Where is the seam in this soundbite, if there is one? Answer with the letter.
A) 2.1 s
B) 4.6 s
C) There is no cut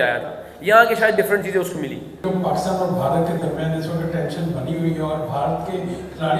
A